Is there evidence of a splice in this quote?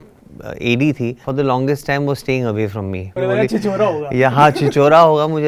yes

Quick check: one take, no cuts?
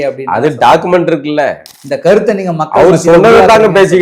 no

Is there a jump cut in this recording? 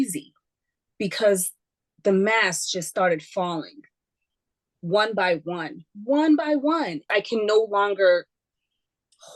yes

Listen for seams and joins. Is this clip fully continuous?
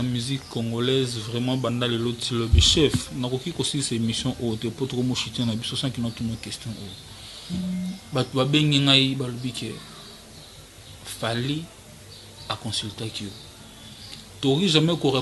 yes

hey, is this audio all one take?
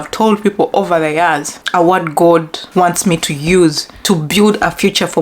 no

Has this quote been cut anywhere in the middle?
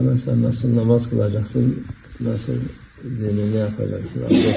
no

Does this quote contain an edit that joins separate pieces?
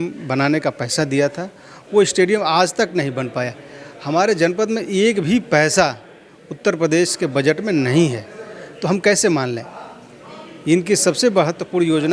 no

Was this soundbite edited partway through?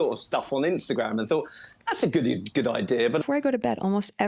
yes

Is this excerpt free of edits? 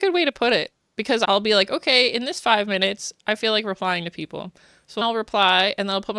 no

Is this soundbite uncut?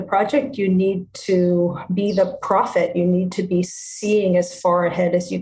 yes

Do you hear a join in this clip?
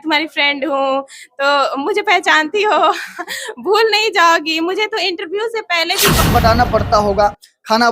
yes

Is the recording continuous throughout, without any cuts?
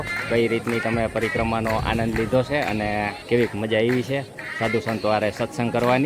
no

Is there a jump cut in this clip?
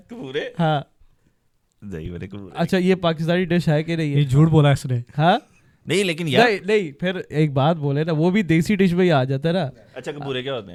no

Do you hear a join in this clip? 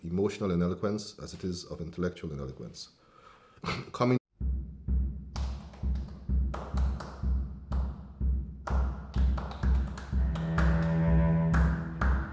no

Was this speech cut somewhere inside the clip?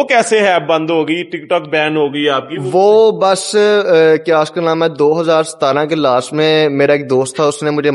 no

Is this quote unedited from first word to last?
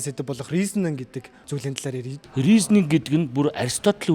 no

